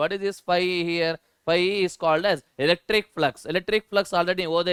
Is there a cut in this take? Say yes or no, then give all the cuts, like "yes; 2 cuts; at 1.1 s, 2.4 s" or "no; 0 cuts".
no; 0 cuts